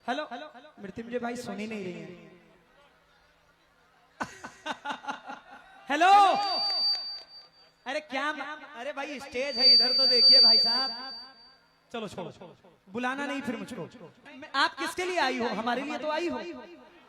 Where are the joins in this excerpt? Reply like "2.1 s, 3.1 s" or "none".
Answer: 14.3 s